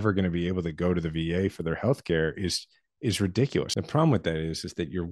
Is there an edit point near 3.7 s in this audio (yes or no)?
yes